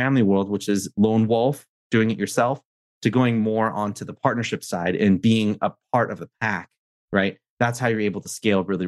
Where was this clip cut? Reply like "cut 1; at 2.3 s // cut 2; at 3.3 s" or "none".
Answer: none